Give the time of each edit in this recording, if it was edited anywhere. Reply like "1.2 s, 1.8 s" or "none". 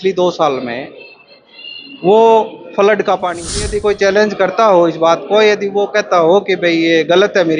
3.6 s